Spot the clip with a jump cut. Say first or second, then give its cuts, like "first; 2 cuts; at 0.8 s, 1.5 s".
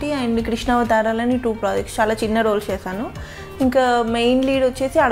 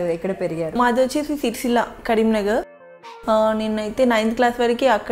second; 2 cuts; at 0.7 s, 2.8 s